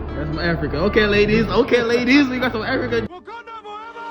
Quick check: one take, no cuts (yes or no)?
no